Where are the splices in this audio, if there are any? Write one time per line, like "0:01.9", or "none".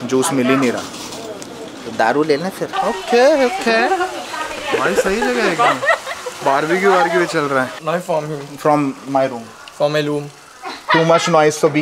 0:02.6
0:07.8